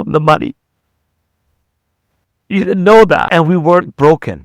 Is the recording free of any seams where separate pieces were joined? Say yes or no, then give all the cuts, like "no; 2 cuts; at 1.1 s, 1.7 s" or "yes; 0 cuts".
no; 1 cut; at 3.3 s